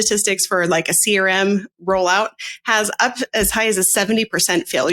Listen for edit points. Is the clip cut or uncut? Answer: cut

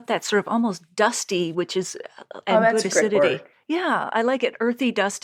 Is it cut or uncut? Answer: uncut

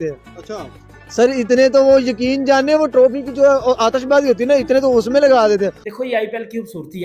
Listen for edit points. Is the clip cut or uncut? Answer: cut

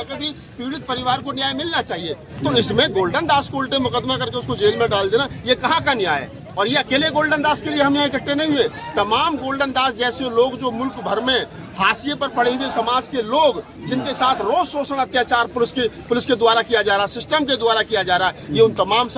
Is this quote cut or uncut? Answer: uncut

